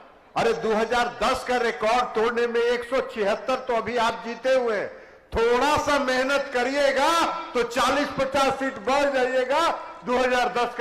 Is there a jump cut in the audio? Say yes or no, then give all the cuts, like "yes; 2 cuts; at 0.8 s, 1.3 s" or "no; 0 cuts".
no; 0 cuts